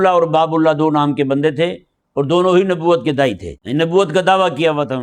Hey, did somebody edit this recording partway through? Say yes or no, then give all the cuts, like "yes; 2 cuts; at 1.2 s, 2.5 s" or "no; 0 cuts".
yes; 1 cut; at 3.5 s